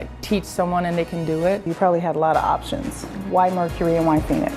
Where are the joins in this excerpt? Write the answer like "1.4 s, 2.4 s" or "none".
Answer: 1.7 s, 3.3 s